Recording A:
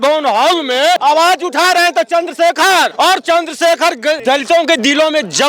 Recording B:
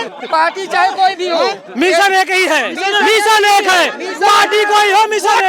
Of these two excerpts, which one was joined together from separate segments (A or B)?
A